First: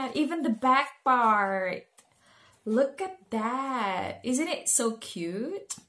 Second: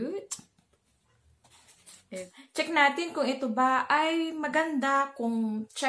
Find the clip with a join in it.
second; 1 cut; at 1.9 s

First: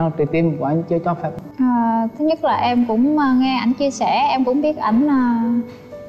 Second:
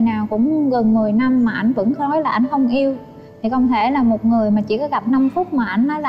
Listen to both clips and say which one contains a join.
first; 1 cut; at 1.3 s

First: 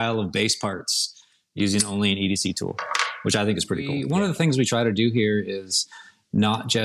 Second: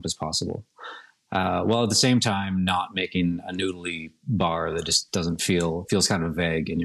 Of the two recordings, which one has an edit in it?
first; 1 cut; at 4.0 s

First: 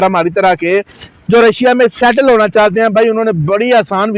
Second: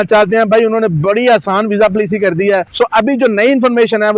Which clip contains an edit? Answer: second; 1 cut; at 2.7 s

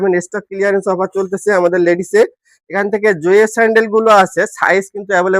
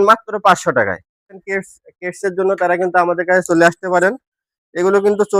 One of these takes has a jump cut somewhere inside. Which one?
second; 2 cuts; at 1.4 s, 3.8 s

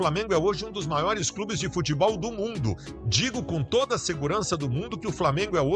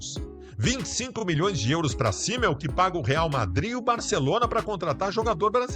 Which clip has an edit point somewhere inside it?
first; 1 cut; at 2.8 s

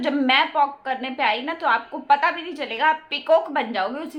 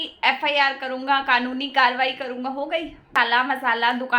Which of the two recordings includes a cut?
second; 1 cut; at 3.1 s

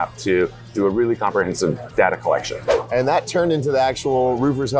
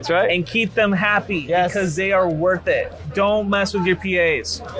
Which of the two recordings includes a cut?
first; 1 cut; at 2.6 s

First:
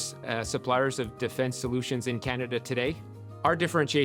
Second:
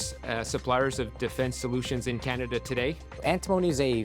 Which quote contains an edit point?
second; 1 cut; at 3.1 s

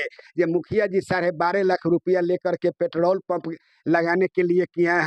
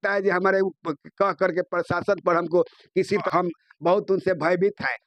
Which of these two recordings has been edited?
second; 1 cut; at 3.2 s

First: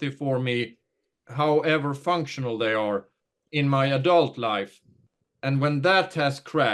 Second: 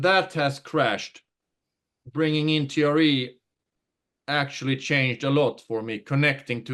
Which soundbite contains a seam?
first; 2 cuts; at 1.2 s, 3.4 s

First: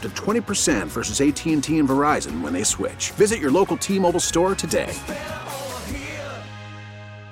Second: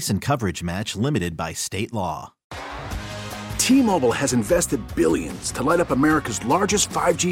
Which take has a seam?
second; 1 cut; at 2.4 s

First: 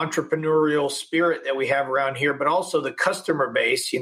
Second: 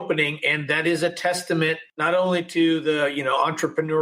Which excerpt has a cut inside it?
second; 1 cut; at 1.9 s

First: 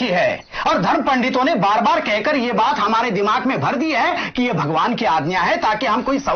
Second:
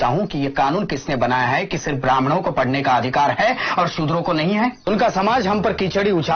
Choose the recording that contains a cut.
second; 1 cut; at 4.9 s

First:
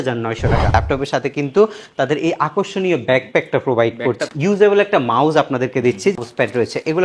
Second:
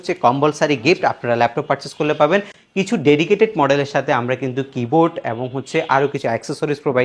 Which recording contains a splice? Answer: first; 3 cuts; at 0.7 s, 4.2 s, 6.1 s

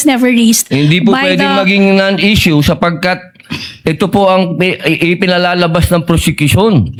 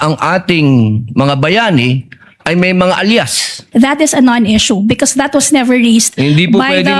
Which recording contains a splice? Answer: second; 1 cut; at 3.5 s

